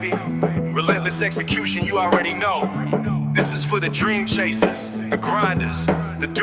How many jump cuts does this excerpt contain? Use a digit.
0